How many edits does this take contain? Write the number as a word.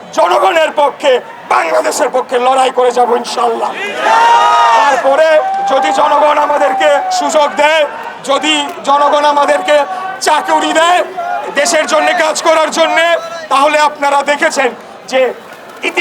zero